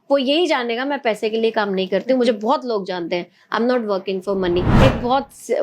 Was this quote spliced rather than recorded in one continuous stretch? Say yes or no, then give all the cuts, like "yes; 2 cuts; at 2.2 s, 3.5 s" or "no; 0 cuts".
yes; 1 cut; at 4.7 s